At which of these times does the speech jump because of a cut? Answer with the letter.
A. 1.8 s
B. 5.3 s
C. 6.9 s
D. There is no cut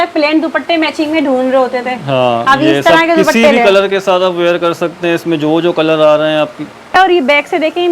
C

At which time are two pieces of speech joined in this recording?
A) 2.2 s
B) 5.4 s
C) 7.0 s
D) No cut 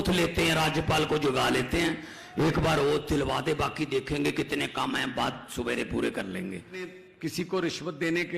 C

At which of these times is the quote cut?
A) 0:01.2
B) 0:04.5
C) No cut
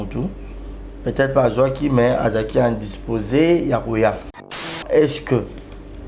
B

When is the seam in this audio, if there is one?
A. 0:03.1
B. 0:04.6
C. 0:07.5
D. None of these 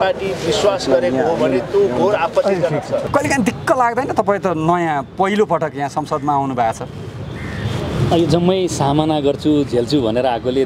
A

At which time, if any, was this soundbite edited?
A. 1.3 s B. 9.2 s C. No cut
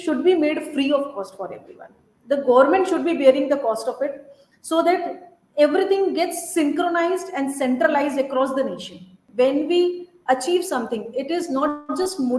B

